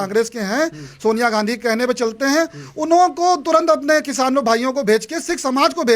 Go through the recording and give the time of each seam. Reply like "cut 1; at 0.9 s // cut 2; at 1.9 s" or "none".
none